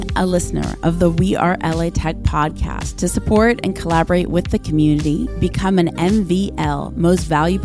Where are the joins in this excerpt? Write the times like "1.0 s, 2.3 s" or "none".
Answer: none